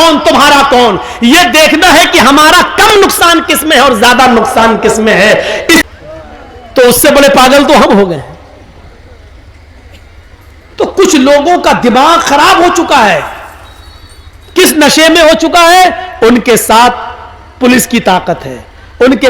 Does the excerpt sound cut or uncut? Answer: cut